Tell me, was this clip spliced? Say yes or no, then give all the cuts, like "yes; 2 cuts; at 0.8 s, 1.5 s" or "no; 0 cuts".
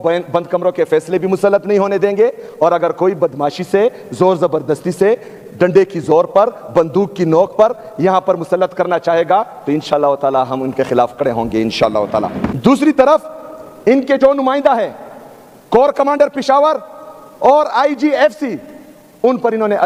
no; 0 cuts